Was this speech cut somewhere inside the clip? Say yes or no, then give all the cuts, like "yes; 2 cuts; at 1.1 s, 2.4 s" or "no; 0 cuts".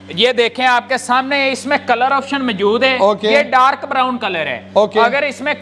no; 0 cuts